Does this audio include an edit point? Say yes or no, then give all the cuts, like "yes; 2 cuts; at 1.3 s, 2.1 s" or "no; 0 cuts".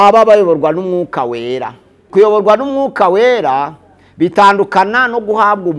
yes; 1 cut; at 2.1 s